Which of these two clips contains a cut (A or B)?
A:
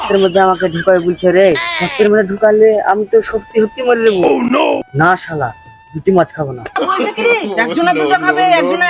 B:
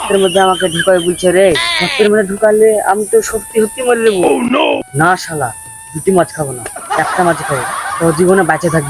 A